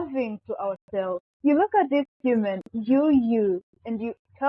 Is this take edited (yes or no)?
yes